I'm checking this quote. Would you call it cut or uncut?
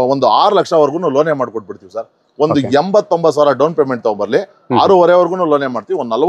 uncut